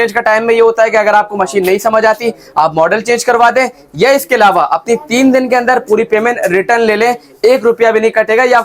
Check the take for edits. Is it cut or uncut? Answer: uncut